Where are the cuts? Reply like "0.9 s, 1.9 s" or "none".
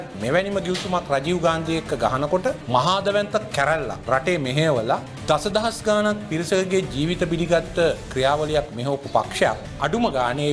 none